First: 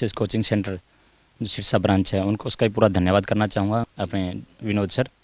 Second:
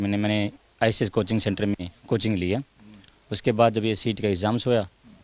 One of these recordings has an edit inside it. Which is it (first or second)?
first